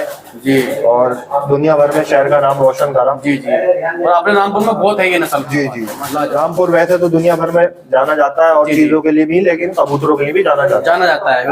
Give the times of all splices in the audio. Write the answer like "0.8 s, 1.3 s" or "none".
5.9 s

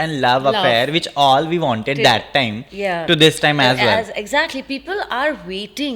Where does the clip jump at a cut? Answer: none

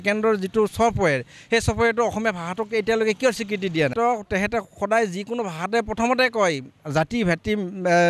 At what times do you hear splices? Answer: 3.9 s

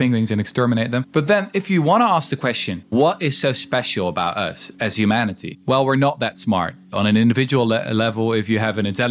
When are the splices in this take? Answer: 1.0 s, 2.9 s, 5.5 s, 6.8 s

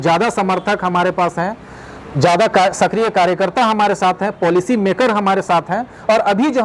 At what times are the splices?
none

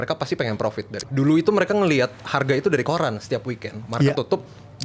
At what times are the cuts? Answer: 1.0 s

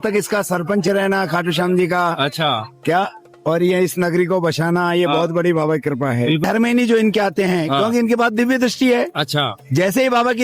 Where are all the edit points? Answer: 6.4 s

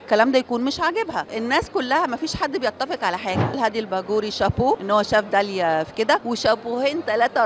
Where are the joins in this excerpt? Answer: 1.3 s, 3.6 s, 4.8 s, 6.2 s

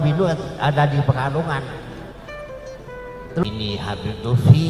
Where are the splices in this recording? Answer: 3.4 s

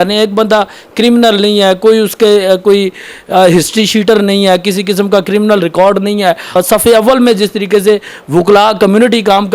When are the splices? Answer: 6.6 s

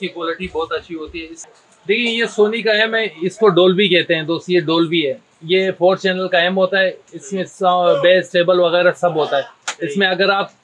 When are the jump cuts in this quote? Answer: 1.4 s

